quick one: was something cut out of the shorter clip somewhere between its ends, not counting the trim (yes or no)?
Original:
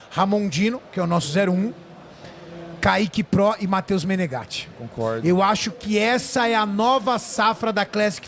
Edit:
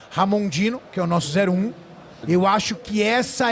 yes